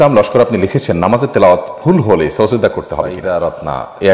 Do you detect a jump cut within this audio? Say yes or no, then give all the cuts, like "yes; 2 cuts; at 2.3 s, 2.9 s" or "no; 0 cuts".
yes; 1 cut; at 3.2 s